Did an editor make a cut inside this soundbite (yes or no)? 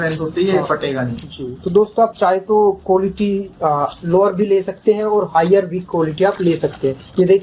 no